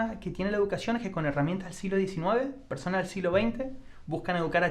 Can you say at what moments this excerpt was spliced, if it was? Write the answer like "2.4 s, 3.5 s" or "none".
none